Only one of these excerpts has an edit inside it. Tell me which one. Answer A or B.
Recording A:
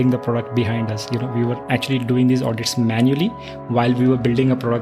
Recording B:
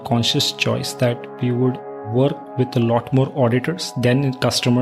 B